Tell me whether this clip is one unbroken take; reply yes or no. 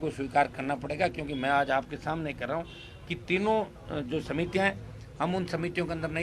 yes